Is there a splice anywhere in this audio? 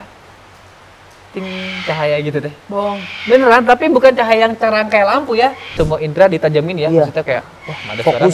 yes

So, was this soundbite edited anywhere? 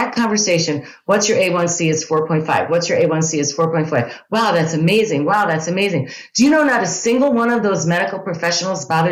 no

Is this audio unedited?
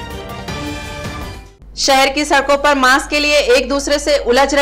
yes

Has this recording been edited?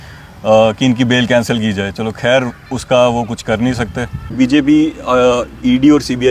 yes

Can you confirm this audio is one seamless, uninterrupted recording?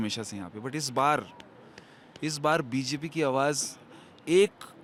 yes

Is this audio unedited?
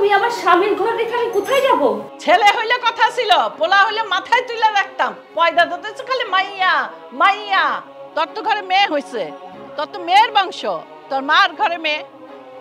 no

